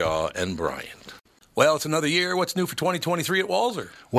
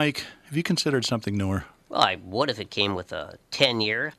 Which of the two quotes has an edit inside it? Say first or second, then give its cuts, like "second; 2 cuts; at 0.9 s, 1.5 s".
first; 1 cut; at 1.2 s